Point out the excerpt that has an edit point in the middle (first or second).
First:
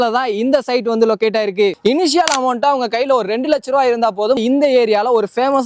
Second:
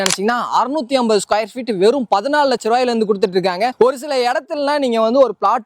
first